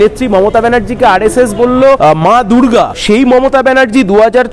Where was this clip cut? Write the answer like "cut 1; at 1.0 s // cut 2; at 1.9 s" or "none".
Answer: cut 1; at 2.0 s // cut 2; at 3.0 s